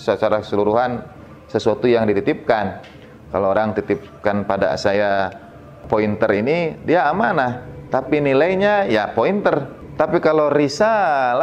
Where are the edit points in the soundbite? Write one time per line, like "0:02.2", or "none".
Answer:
none